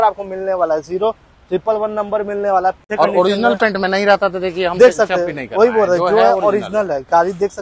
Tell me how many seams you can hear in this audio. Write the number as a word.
one